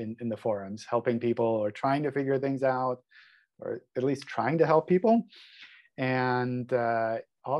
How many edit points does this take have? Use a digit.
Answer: 0